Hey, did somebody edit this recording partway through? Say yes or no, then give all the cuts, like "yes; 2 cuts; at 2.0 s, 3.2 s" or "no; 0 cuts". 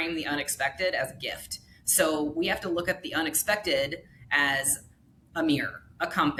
no; 0 cuts